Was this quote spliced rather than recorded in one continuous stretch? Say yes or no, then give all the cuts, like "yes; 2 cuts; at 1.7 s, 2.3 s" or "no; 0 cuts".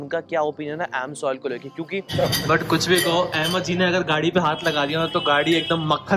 yes; 1 cut; at 2.1 s